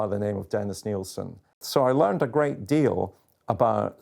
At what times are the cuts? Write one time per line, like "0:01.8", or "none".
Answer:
0:01.6